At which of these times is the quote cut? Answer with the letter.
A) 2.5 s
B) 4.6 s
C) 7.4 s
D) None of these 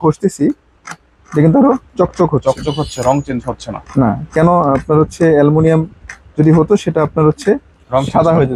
D